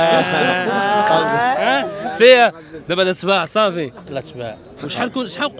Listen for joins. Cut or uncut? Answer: uncut